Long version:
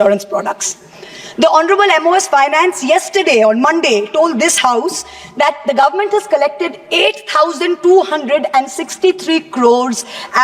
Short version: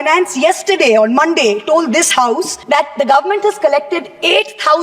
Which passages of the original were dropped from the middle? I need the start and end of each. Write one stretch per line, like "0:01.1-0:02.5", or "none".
0:05.0-0:05.2